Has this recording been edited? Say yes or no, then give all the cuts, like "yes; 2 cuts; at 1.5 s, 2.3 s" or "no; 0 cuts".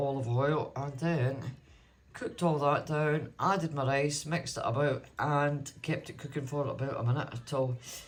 no; 0 cuts